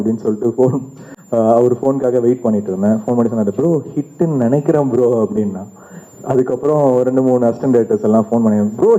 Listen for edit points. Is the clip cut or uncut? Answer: uncut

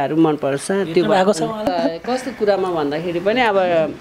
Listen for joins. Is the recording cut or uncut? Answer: cut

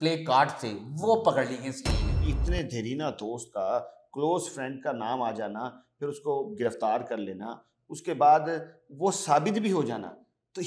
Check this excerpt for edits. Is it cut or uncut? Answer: cut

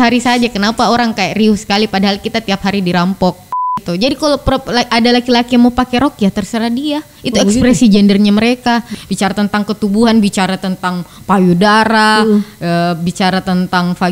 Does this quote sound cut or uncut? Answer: cut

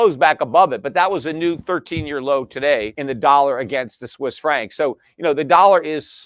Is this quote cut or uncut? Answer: cut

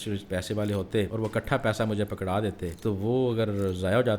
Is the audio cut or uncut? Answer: cut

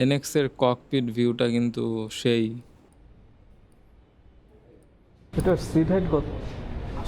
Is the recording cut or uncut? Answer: uncut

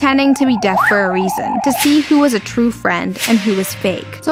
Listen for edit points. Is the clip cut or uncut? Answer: uncut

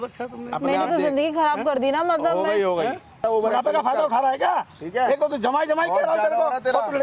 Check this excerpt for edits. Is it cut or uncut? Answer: cut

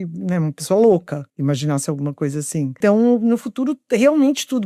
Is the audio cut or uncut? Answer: cut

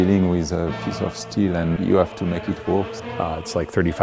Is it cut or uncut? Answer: cut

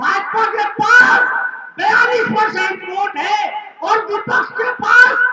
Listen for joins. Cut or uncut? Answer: uncut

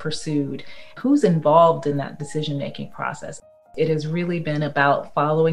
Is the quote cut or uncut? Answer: cut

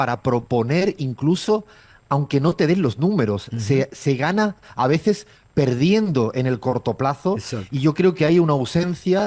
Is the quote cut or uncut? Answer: uncut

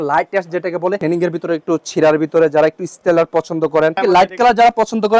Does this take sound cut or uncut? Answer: cut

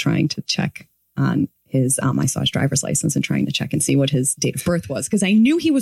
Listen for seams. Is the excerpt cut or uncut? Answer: cut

